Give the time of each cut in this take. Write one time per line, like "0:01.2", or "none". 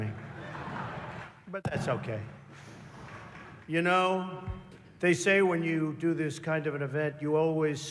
none